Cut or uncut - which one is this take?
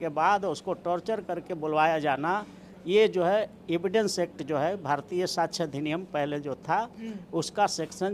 uncut